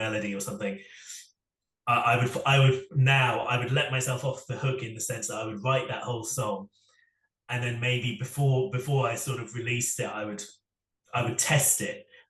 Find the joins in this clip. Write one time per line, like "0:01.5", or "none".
none